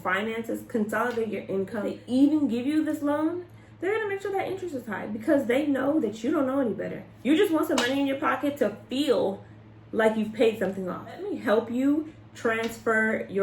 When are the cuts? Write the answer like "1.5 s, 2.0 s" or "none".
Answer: 1.9 s, 11.3 s